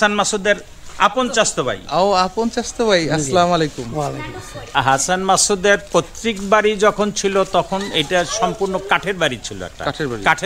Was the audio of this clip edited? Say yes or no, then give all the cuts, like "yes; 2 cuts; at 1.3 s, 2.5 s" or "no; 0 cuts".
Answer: yes; 1 cut; at 4.7 s